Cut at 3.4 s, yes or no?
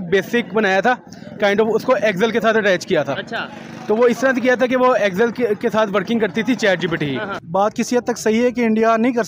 no